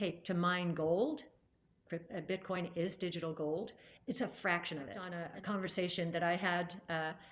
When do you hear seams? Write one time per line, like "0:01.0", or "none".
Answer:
0:05.2